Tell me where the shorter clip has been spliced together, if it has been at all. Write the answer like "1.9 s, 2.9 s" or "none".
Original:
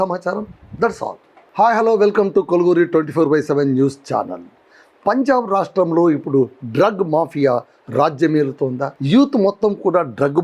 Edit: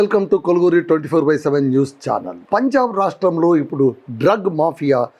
2.3 s